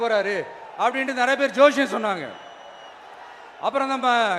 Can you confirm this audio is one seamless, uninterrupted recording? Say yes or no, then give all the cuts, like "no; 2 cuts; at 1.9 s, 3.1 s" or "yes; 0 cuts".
yes; 0 cuts